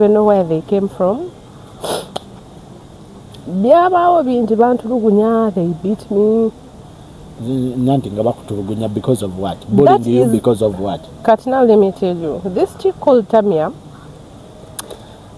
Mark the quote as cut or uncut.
uncut